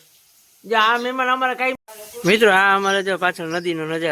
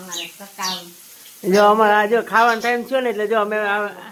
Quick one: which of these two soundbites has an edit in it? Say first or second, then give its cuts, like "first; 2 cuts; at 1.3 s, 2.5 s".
first; 1 cut; at 1.8 s